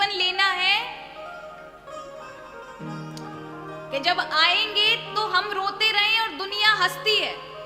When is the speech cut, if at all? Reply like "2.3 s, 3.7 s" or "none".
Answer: none